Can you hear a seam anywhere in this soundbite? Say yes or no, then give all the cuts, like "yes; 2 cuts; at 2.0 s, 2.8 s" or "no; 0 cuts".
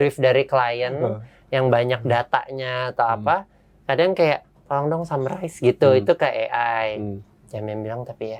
no; 0 cuts